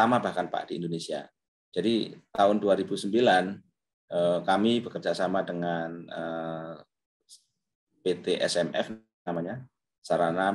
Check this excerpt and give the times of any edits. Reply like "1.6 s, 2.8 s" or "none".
none